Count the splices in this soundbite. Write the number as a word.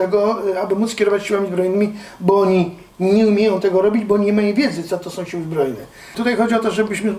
one